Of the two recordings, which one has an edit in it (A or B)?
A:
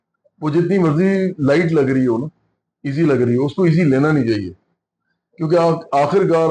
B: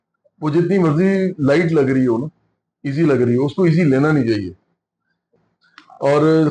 B